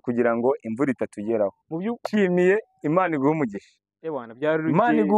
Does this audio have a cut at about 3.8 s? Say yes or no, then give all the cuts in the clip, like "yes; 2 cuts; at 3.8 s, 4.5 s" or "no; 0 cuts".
no; 1 cut; at 2.0 s